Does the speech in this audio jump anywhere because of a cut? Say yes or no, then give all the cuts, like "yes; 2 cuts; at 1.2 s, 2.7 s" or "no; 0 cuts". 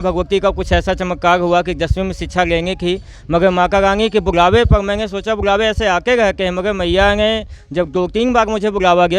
no; 0 cuts